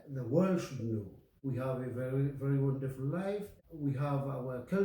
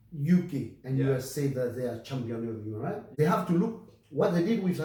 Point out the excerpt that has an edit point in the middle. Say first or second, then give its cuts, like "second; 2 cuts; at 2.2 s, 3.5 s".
first; 2 cuts; at 1.3 s, 3.5 s